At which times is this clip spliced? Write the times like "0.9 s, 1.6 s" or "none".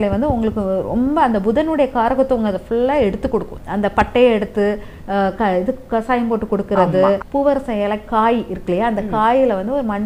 3.6 s, 7.2 s